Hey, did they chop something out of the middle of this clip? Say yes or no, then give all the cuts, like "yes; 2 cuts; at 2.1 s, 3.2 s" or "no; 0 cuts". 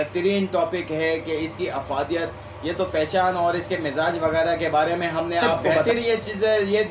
yes; 1 cut; at 5.8 s